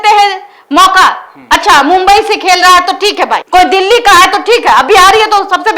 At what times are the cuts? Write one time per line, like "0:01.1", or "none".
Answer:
none